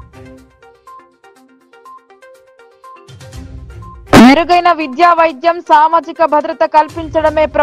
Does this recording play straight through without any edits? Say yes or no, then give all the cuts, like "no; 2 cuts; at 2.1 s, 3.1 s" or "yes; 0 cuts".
no; 2 cuts; at 1.0 s, 4.0 s